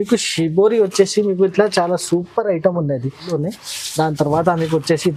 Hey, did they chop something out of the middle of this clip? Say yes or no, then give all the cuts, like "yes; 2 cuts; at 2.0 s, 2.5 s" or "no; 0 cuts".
yes; 1 cut; at 3.2 s